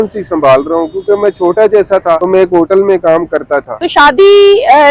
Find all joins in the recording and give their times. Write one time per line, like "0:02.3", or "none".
0:02.2
0:03.8